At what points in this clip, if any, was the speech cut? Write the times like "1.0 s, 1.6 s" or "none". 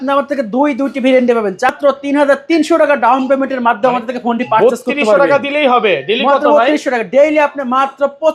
1.7 s